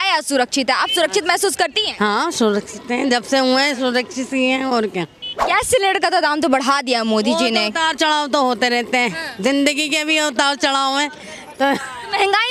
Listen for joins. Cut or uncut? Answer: uncut